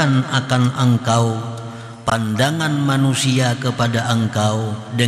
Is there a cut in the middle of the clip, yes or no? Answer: no